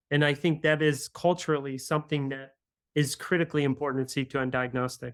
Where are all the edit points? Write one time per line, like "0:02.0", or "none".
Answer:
none